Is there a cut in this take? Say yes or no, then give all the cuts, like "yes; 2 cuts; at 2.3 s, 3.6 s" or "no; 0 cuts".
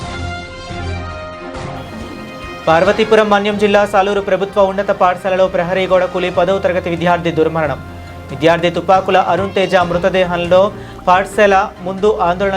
no; 0 cuts